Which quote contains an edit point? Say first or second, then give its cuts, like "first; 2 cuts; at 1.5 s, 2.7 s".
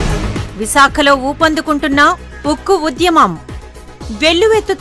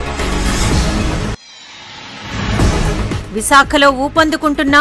second; 1 cut; at 1.2 s